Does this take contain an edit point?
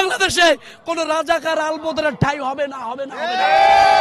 no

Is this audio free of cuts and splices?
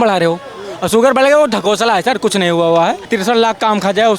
no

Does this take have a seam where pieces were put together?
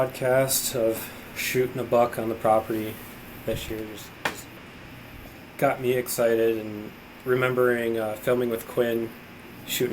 yes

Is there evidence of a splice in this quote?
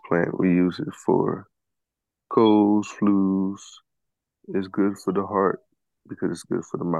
no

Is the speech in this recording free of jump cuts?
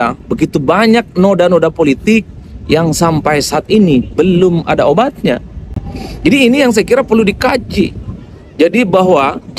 yes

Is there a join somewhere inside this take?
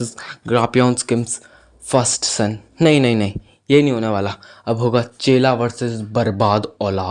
no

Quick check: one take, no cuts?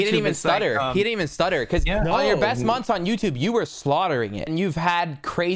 no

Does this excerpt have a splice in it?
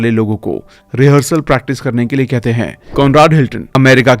yes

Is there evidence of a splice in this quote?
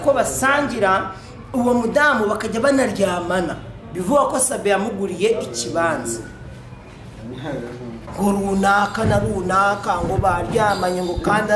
yes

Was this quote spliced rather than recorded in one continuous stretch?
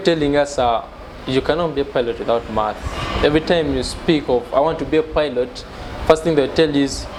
no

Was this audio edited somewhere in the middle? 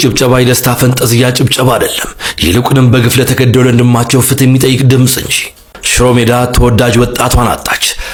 no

